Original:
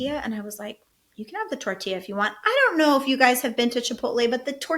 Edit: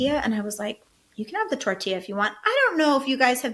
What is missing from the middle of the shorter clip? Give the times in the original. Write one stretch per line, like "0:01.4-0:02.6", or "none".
none